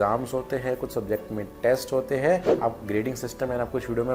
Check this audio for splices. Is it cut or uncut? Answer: cut